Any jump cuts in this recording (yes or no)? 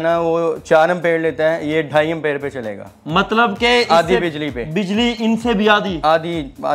no